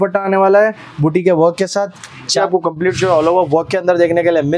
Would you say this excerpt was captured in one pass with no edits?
no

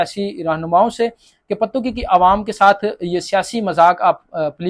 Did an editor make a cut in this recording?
no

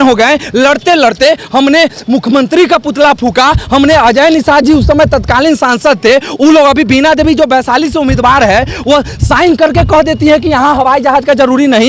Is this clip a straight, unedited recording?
yes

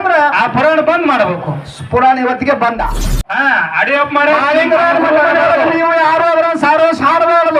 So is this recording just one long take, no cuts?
no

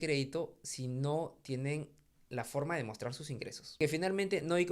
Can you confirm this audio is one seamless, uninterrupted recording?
no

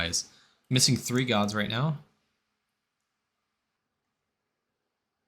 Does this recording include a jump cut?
yes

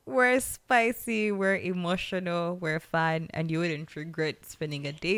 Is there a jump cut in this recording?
no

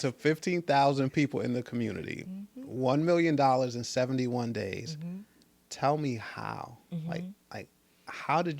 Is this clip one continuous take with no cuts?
yes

